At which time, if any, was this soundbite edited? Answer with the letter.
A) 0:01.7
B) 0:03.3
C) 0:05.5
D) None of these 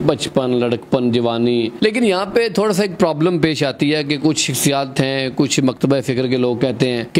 A